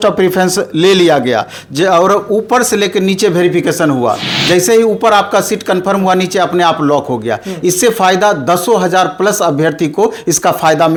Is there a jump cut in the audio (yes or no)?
no